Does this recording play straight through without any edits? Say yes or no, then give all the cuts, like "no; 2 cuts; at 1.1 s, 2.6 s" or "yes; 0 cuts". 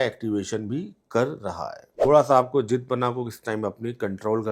no; 1 cut; at 2.0 s